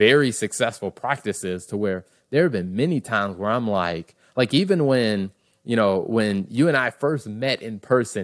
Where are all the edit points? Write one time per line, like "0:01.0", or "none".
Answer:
none